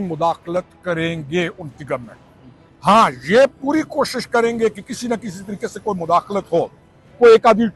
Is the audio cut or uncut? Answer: uncut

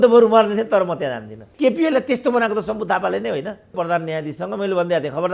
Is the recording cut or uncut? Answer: cut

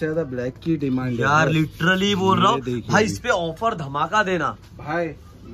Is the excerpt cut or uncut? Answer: uncut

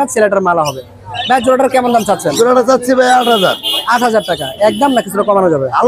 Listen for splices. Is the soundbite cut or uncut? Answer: uncut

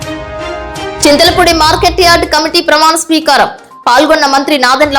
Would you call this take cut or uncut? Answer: cut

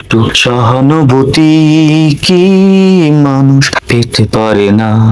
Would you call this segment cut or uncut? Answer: uncut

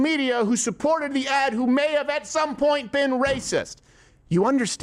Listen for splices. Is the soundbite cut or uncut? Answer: uncut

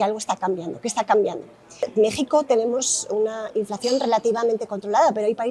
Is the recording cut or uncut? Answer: cut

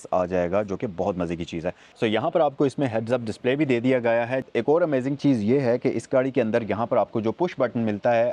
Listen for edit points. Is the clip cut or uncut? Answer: cut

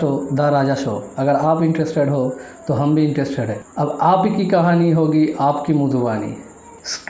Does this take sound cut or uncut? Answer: uncut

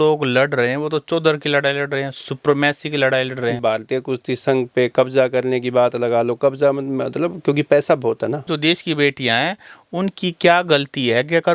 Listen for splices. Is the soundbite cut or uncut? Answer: cut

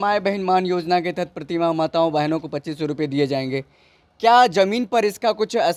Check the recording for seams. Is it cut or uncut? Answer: uncut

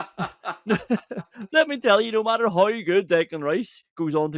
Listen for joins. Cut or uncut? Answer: uncut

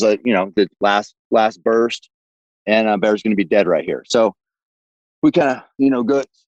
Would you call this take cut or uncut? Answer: uncut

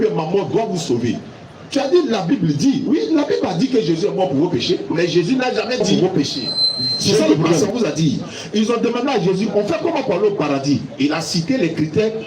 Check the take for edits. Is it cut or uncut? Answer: cut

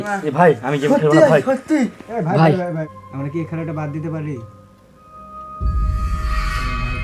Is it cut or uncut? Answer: cut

